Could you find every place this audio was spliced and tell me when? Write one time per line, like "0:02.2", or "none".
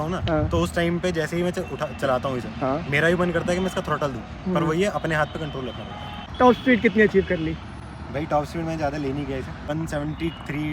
0:06.2
0:09.6